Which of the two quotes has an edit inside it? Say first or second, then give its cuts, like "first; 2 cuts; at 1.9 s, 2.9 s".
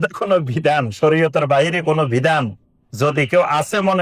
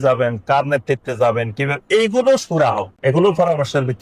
second; 1 cut; at 2.9 s